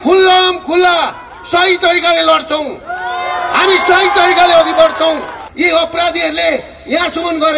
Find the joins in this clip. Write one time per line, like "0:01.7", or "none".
0:05.4